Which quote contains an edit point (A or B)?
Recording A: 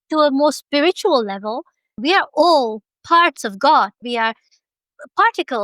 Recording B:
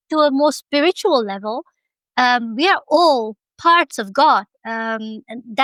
A